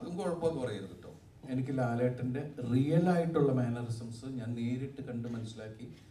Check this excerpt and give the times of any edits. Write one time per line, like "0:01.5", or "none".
0:01.4